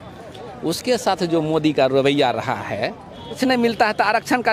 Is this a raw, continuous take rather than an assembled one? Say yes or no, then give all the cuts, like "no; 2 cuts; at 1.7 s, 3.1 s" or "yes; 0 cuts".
no; 1 cut; at 3.4 s